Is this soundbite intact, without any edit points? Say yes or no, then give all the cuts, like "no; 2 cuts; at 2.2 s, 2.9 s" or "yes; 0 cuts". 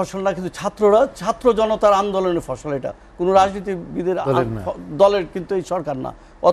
yes; 0 cuts